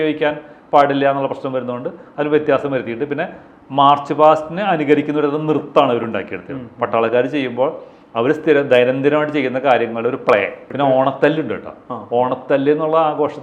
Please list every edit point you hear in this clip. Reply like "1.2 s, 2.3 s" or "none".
10.6 s